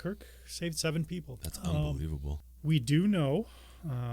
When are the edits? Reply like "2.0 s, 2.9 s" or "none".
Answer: 1.4 s, 2.3 s